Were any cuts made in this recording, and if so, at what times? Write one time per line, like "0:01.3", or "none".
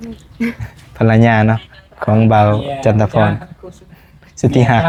none